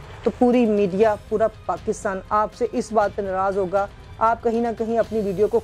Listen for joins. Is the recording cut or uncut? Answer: uncut